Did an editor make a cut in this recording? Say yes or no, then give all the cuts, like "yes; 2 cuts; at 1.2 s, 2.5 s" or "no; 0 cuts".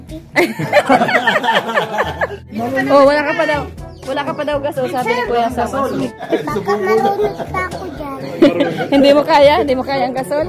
yes; 2 cuts; at 2.4 s, 6.3 s